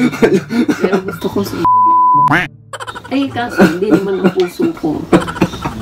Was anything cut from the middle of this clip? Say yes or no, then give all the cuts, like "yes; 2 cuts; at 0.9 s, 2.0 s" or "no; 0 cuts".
no; 0 cuts